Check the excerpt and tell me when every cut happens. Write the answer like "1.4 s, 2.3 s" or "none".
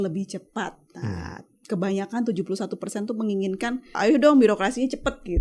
1.5 s, 3.9 s